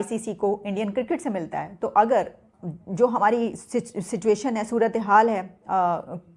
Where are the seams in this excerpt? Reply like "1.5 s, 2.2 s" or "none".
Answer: 2.6 s

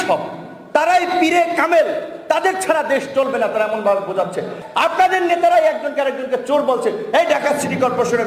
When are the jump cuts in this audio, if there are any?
4.6 s

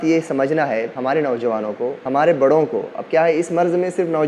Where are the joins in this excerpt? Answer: 0.9 s, 2.0 s

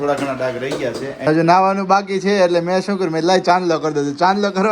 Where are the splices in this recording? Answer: 1.3 s

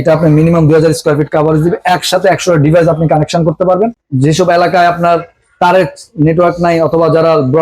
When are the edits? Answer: 4.0 s

